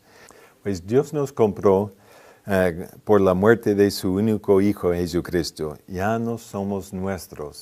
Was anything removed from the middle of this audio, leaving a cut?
yes; 1 cut; at 4.4 s

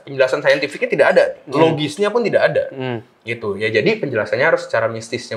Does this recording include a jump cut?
no; 0 cuts

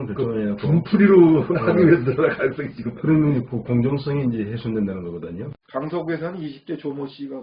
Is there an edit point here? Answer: yes; 1 cut; at 5.5 s

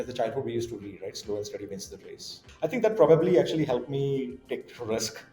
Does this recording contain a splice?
yes; 1 cut; at 2.4 s

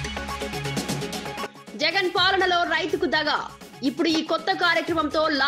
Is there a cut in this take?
yes; 1 cut; at 1.4 s

